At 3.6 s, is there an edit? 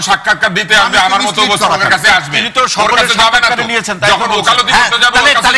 no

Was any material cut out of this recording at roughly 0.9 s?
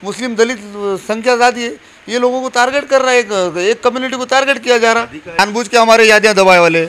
no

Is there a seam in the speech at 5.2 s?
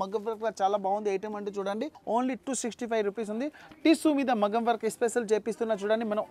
no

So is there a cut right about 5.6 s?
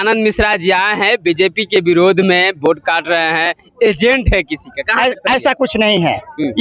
no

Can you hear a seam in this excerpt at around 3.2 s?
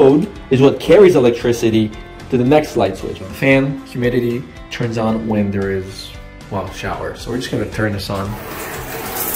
yes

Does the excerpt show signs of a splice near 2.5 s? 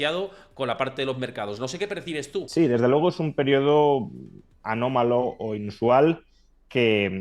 yes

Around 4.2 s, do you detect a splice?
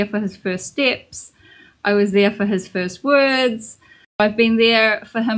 yes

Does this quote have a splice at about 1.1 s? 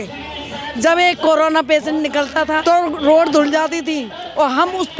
no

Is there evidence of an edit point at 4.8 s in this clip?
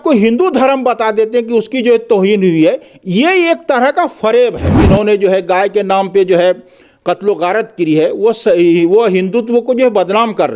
yes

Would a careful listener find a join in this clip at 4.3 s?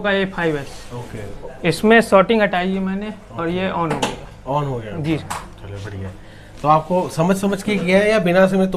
no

